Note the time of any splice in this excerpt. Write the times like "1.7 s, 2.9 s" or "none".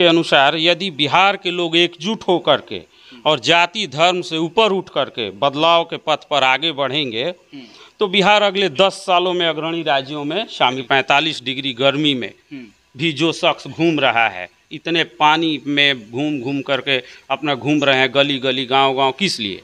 10.8 s

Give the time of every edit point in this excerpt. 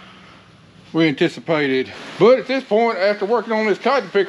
2.0 s

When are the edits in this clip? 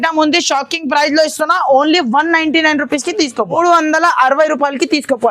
3.6 s

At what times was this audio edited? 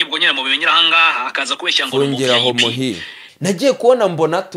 3.3 s

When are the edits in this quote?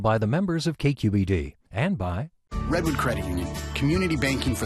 2.4 s

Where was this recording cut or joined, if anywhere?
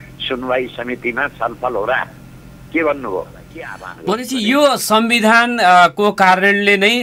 3.9 s

